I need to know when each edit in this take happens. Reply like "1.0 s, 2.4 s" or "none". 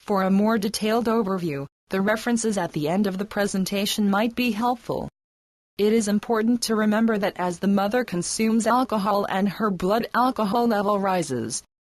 8.8 s